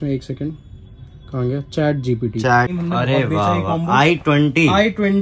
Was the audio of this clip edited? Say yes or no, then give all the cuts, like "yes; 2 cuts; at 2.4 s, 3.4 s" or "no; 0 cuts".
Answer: yes; 1 cut; at 2.7 s